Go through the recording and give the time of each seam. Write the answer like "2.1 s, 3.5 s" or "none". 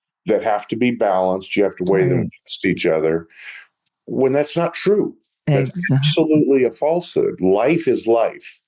none